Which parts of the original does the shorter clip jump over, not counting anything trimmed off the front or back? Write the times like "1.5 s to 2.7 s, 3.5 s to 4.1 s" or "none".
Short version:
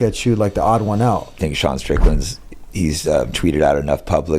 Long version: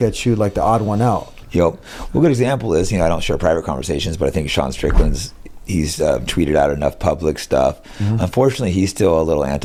1.4 s to 4.4 s